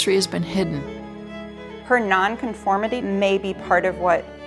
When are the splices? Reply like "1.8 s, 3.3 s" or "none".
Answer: 1.2 s, 3.0 s